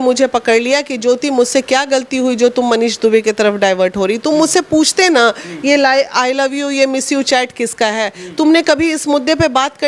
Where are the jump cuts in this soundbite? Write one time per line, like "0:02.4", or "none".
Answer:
none